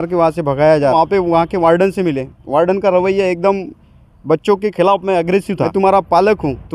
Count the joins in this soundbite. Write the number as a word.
two